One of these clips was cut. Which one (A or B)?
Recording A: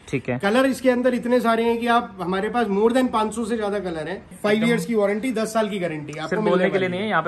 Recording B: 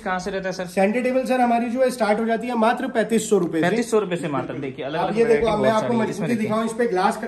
A